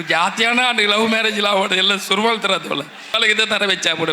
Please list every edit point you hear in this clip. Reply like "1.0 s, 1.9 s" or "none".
3.1 s